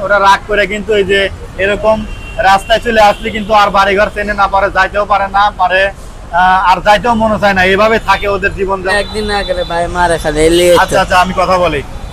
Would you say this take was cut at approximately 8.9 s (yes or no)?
yes